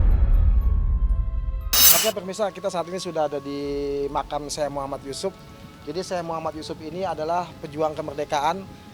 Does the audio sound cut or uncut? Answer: uncut